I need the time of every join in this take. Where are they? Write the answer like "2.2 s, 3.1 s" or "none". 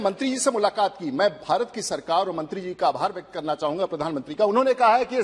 none

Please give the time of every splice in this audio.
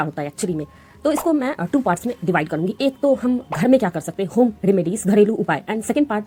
none

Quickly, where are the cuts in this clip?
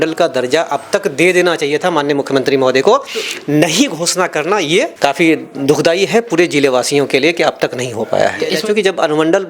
4.9 s, 8.5 s

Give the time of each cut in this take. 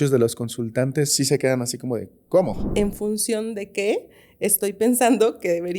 1.1 s, 2.6 s

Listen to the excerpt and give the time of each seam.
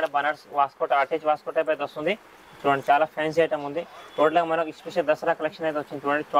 none

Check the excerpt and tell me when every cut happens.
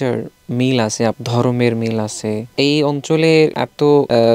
1.2 s, 2.5 s

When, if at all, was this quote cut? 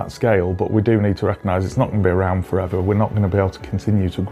none

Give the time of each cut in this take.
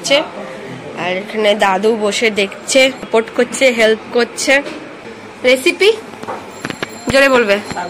3.0 s, 5.2 s

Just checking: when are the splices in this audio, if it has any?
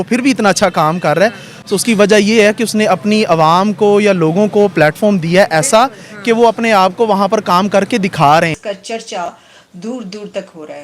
8.6 s

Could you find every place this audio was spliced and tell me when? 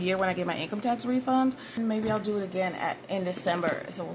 1.8 s

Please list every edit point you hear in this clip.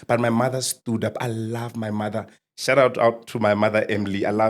none

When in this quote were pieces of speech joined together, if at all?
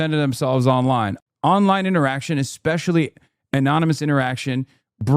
1.1 s

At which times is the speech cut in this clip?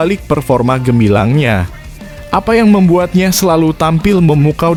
none

